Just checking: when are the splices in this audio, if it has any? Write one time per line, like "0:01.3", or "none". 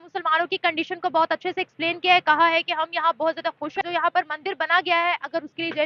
0:03.8